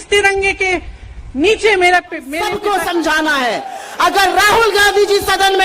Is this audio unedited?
no; 1 cut; at 2.4 s

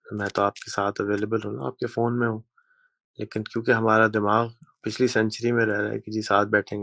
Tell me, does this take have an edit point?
no; 0 cuts

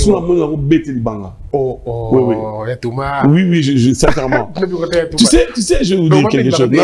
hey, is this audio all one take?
yes; 0 cuts

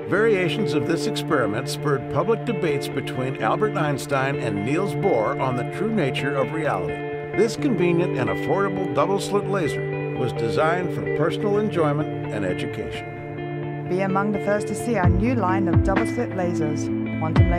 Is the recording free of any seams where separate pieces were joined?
yes; 0 cuts

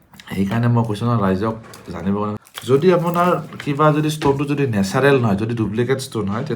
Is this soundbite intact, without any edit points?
no; 1 cut; at 2.4 s

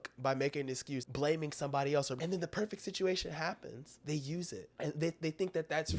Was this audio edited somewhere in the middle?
yes; 4 cuts; at 1.0 s, 2.1 s, 3.9 s, 4.7 s

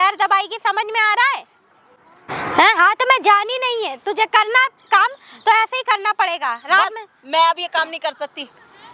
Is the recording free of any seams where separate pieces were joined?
yes; 0 cuts

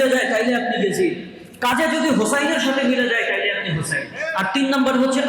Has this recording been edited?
yes; 1 cut; at 4.2 s

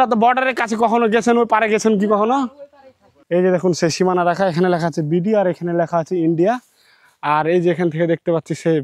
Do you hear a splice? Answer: yes; 1 cut; at 3.4 s

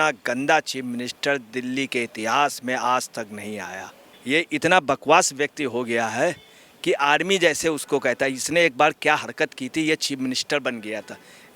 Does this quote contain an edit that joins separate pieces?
no; 0 cuts

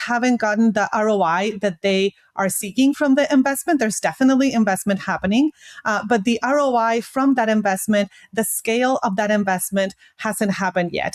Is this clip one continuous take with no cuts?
yes; 0 cuts

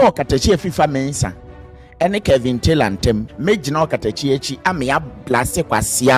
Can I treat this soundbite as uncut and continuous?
no; 1 cut; at 3.3 s

